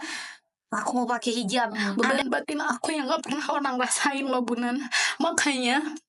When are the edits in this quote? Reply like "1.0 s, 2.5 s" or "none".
1.9 s

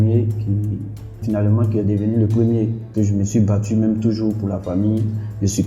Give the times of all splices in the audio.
1.2 s, 2.8 s

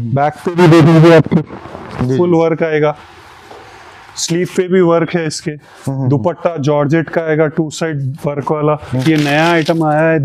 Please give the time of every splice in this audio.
9.0 s

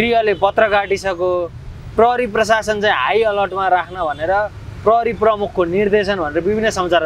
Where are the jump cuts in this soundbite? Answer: none

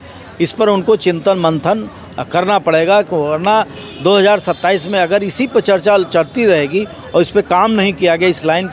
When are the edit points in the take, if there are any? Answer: none

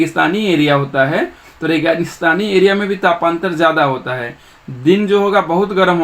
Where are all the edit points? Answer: none

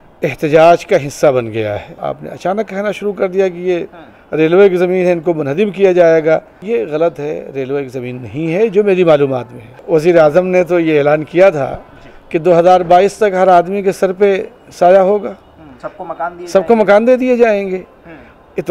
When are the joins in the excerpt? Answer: 1.9 s, 6.5 s, 9.8 s

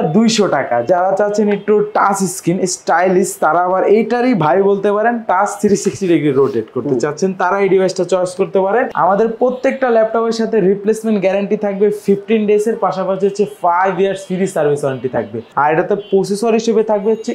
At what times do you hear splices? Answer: 0.9 s, 8.9 s, 15.4 s

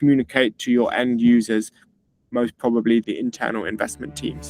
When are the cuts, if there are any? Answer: 3.0 s

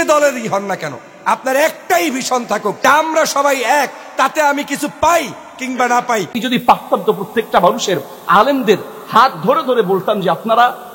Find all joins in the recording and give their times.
2.8 s, 6.4 s

